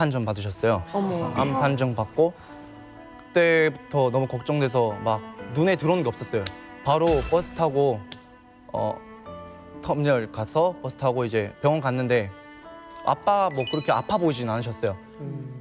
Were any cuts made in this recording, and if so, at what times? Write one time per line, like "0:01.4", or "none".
none